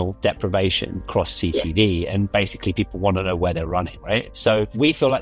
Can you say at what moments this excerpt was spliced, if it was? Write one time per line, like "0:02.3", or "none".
0:01.0
0:02.3